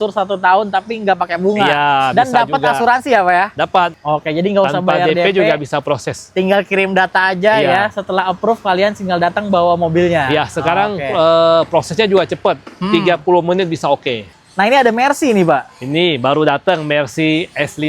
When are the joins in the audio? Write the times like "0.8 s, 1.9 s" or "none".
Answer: 3.9 s, 14.2 s